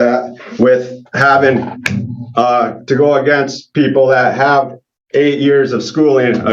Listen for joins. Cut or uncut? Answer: uncut